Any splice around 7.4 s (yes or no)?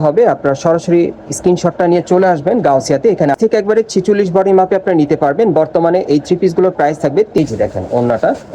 yes